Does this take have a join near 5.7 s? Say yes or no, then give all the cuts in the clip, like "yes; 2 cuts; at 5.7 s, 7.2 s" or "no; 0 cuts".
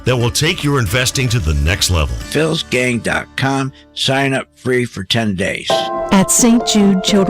yes; 1 cut; at 5.7 s